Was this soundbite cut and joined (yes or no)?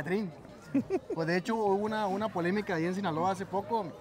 no